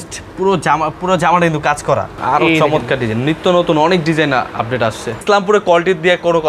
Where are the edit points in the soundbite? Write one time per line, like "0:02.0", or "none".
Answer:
0:02.2
0:05.2